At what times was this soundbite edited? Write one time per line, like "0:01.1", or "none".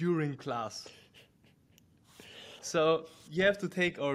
none